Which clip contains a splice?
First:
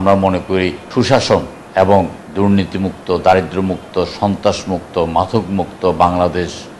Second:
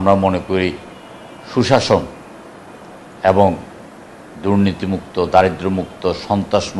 first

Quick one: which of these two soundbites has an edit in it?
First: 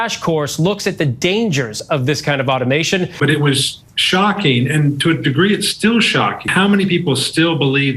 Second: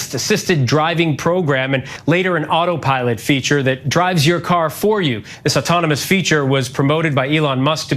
first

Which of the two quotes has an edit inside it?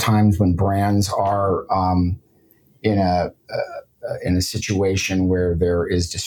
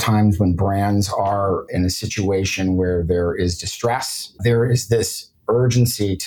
second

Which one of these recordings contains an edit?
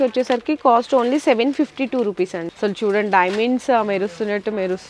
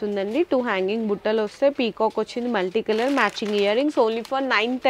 first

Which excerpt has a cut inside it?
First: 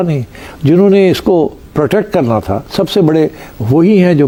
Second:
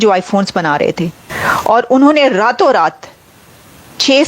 second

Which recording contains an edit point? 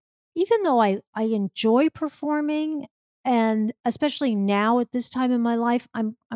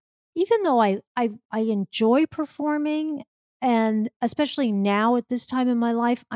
first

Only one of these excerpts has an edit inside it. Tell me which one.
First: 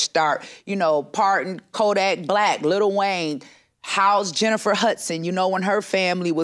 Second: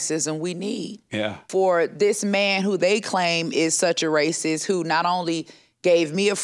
second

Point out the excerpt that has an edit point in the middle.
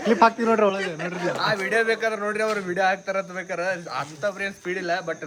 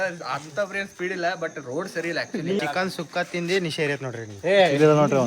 second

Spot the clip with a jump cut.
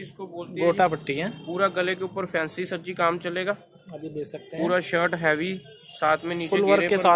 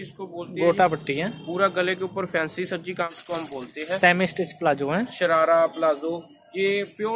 second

